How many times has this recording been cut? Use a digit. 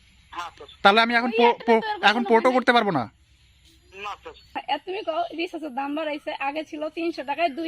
1